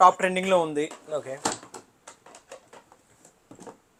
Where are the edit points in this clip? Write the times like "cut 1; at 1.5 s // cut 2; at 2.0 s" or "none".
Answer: none